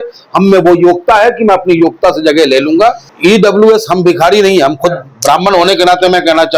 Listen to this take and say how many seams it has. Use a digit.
1